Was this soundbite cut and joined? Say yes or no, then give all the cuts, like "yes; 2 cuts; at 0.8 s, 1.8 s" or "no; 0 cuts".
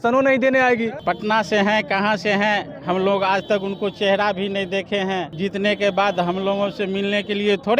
yes; 2 cuts; at 1.0 s, 5.3 s